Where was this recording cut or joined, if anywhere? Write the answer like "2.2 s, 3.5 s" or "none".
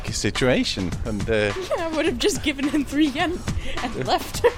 none